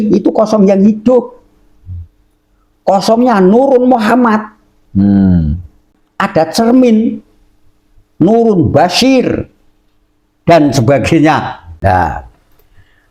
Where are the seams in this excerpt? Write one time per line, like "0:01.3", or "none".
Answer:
0:11.6